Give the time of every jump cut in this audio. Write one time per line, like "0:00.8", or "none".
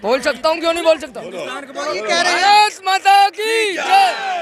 none